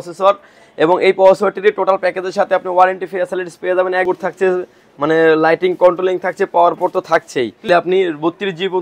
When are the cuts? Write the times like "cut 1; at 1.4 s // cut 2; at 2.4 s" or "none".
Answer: cut 1; at 4.0 s // cut 2; at 7.7 s